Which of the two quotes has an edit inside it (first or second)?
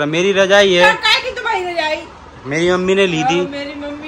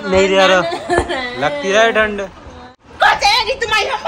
second